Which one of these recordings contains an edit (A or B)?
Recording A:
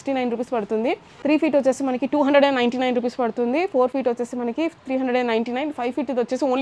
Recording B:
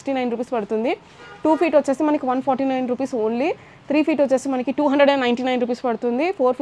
A